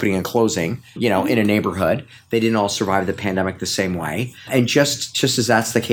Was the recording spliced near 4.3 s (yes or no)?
yes